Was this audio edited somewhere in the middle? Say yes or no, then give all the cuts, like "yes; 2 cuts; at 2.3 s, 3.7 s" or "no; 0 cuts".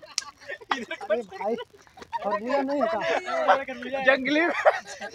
no; 0 cuts